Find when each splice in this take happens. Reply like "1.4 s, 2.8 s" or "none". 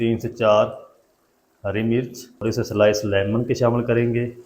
2.4 s